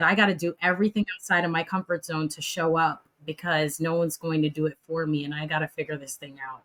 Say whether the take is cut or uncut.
uncut